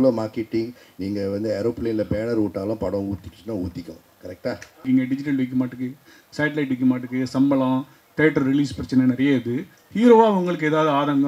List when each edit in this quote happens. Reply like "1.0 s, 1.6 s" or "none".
4.8 s